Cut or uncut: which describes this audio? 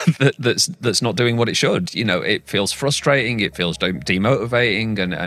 uncut